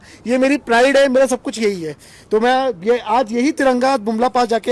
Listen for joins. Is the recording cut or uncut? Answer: uncut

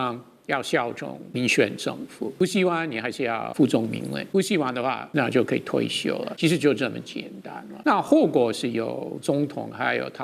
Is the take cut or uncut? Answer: cut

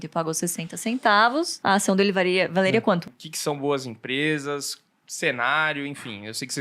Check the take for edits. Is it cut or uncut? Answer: cut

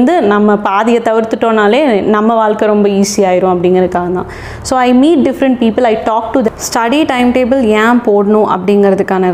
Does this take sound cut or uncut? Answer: cut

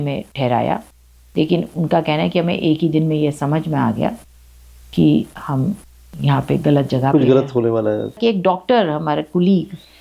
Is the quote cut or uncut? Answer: cut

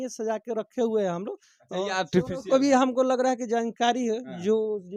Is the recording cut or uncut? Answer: uncut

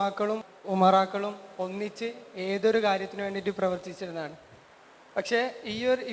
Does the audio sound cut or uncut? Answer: uncut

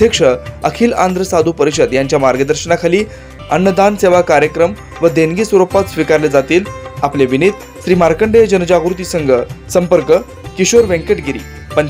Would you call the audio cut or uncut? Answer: cut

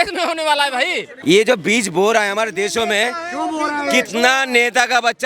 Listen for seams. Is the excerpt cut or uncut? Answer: cut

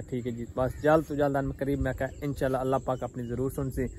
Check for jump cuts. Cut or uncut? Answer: uncut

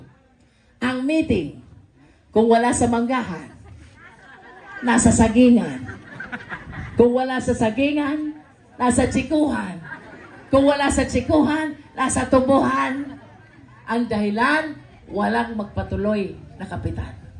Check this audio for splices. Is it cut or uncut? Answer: uncut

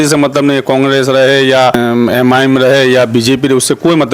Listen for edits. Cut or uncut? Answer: cut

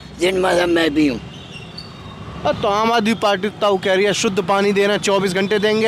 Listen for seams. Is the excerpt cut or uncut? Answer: uncut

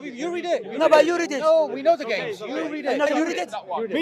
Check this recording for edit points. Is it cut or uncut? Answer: cut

